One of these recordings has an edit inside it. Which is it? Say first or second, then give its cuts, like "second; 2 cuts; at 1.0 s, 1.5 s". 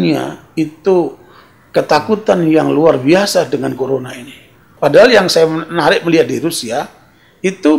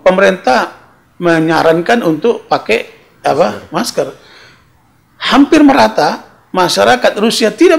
first; 1 cut; at 4.6 s